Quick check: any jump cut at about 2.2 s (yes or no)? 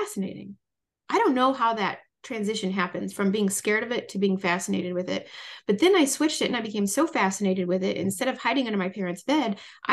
no